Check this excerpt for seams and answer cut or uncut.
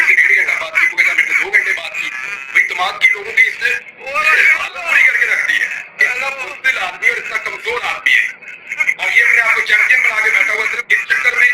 uncut